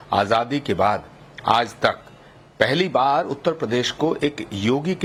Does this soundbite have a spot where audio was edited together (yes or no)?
no